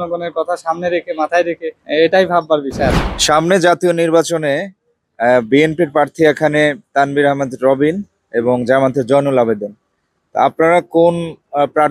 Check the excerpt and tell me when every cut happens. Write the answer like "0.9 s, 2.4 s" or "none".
3.1 s